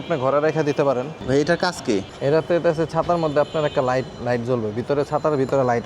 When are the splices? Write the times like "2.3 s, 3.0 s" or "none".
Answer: 1.2 s, 2.1 s